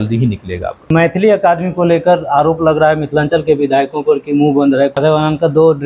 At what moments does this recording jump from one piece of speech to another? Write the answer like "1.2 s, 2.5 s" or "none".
0.9 s, 5.0 s